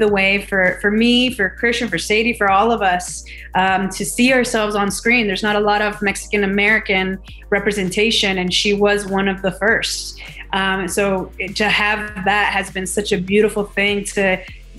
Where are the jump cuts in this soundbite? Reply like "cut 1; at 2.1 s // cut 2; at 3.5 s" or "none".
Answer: none